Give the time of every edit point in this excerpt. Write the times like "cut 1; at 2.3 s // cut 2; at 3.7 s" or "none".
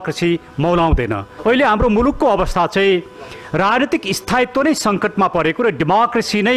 cut 1; at 1.3 s